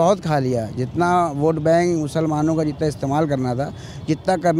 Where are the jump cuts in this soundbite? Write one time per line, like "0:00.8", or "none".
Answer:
none